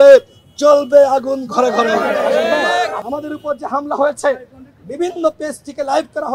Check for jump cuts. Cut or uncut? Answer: cut